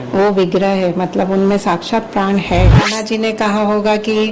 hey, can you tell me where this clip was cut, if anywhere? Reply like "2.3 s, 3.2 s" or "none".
2.9 s